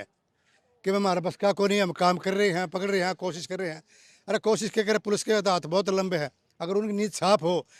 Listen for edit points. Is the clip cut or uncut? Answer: uncut